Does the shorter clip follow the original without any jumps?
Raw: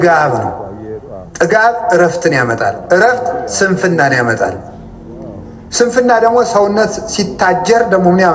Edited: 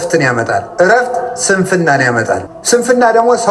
no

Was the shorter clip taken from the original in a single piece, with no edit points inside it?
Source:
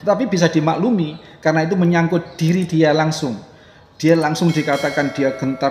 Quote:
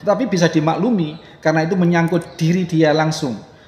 yes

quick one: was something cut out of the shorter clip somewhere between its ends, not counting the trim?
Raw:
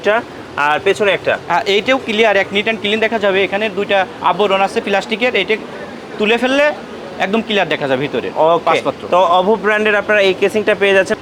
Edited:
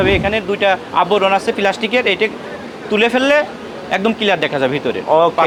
no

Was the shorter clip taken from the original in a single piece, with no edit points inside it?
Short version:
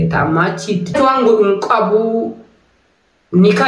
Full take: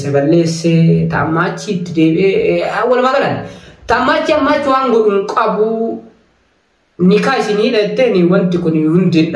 no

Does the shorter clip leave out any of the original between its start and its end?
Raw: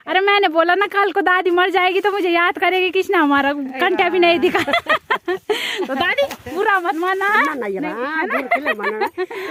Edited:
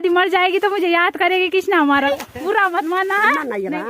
yes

